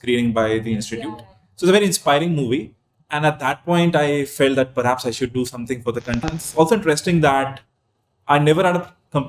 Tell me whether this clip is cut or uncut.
cut